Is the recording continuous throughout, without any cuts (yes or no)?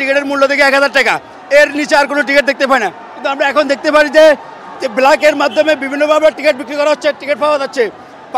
yes